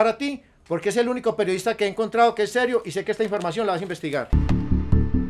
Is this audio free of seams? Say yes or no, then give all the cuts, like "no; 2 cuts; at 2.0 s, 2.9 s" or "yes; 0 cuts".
no; 1 cut; at 4.4 s